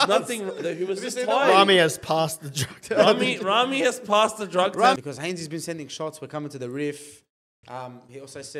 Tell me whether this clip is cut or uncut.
cut